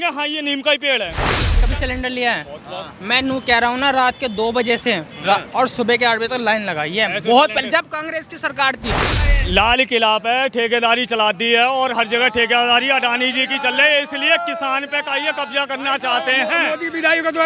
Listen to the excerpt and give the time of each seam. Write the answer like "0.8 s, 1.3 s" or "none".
1.5 s, 9.2 s